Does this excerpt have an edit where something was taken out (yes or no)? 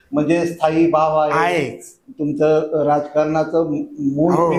no